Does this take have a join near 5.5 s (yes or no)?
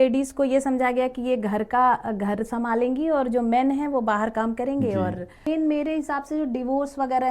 yes